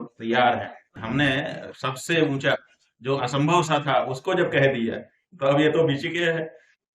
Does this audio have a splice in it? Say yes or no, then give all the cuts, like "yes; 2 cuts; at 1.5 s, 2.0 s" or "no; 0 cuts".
yes; 1 cut; at 1.0 s